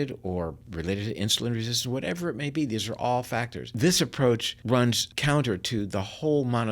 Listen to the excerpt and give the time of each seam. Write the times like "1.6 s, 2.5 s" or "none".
3.6 s, 4.9 s

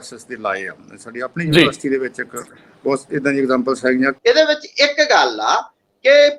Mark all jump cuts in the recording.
4.1 s

